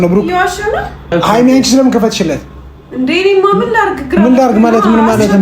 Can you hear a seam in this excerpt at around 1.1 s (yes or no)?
yes